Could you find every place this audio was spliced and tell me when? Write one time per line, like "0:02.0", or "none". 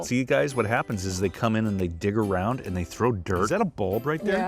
0:03.5